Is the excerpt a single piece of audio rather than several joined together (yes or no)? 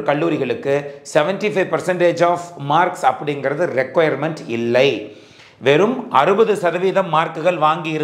yes